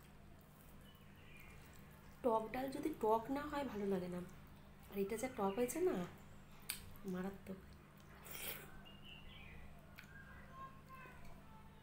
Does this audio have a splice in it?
no; 0 cuts

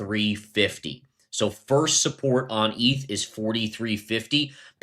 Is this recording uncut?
yes; 0 cuts

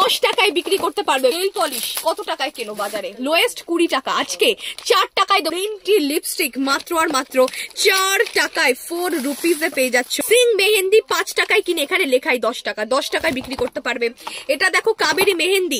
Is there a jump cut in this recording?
yes; 3 cuts; at 1.4 s, 5.5 s, 10.1 s

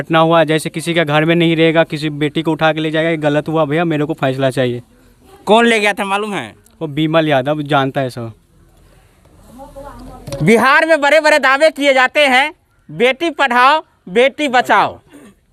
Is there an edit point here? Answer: no; 0 cuts

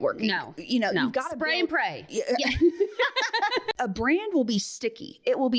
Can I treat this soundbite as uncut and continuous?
no; 1 cut; at 3.7 s

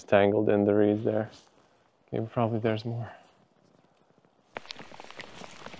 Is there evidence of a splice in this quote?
yes; 1 cut; at 4.5 s

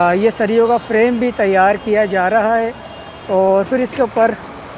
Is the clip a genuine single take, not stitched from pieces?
yes; 0 cuts

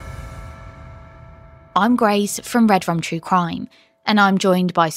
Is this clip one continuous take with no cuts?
no; 1 cut; at 1.3 s

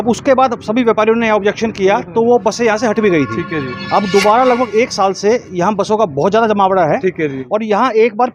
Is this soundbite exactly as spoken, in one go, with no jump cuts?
no; 1 cut; at 7.4 s

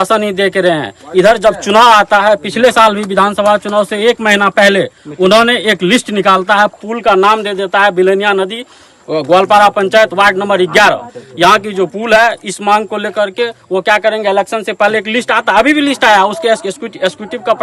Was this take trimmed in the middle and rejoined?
no; 0 cuts

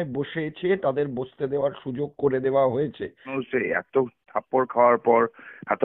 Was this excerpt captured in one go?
no; 1 cut; at 3.4 s

